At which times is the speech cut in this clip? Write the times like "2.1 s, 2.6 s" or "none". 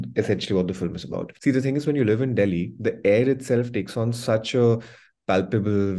1.3 s